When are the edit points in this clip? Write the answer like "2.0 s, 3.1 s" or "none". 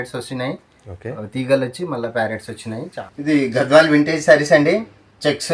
3.0 s